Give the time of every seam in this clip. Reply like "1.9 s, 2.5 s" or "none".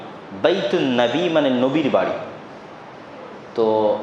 none